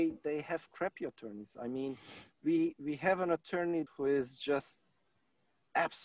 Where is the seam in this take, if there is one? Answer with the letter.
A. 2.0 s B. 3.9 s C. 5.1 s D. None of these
B